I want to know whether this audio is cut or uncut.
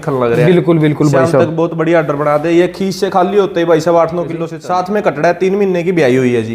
cut